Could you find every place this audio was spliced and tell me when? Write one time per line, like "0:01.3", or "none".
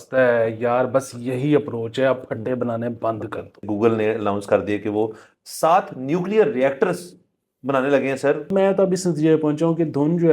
0:03.6
0:08.5